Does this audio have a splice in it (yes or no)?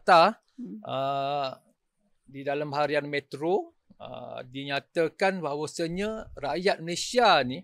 no